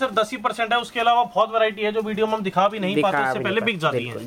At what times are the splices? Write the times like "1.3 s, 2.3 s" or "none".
none